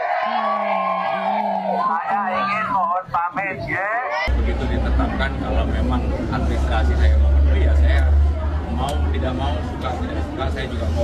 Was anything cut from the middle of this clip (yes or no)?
yes